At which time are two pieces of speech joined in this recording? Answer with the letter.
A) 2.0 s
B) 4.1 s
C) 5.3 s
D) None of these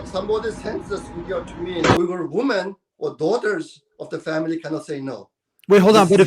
A